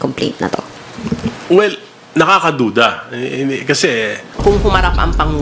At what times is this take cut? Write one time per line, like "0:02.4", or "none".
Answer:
0:04.3